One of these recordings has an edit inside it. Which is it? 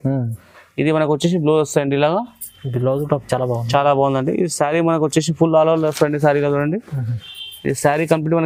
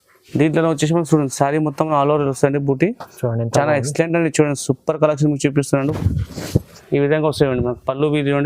second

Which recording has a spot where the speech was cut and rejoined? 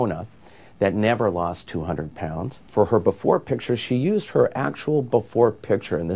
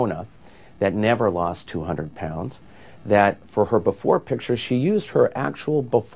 first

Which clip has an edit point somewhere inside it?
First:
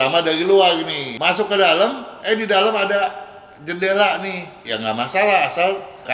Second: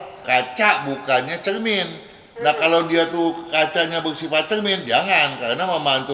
first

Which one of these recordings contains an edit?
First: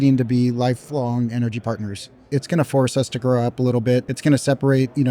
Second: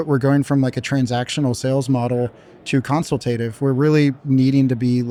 first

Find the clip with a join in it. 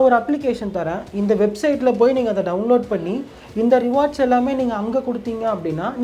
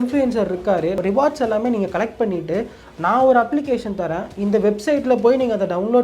second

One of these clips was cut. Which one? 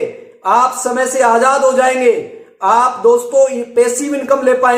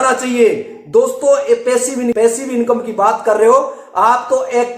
second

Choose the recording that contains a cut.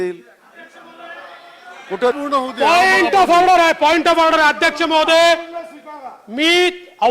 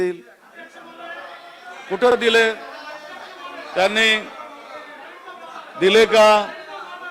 first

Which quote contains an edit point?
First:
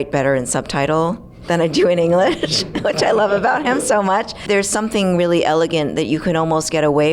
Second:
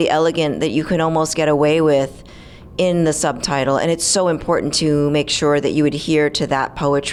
first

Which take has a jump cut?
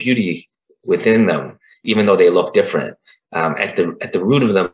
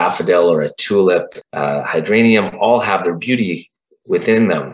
second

